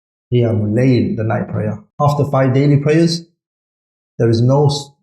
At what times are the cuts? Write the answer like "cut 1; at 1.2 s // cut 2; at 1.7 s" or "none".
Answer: cut 1; at 1.8 s